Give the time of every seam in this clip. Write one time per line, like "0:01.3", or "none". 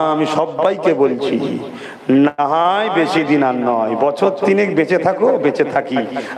none